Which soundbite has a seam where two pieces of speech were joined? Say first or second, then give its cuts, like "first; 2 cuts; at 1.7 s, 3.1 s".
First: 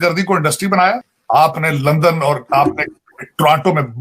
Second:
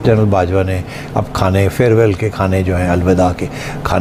first; 1 cut; at 1.1 s